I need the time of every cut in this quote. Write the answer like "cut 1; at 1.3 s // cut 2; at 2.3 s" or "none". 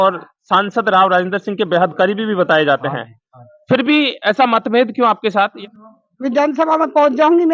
cut 1; at 5.6 s